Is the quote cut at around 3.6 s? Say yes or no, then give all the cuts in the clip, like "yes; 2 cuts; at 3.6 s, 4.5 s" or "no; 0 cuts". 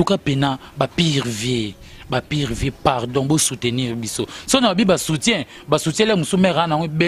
no; 0 cuts